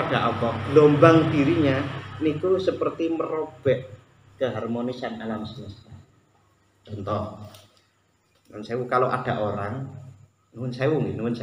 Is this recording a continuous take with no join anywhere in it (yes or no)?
yes